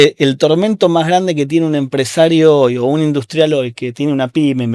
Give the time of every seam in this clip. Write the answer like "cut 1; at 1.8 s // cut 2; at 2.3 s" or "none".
none